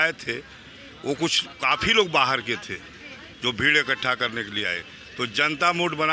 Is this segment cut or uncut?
uncut